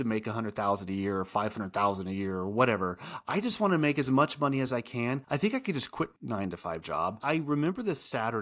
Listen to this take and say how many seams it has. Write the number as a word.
two